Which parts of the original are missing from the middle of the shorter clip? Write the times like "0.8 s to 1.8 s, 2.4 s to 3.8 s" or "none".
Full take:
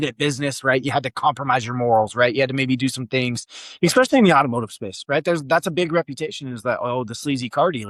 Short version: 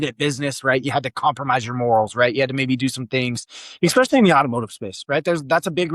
none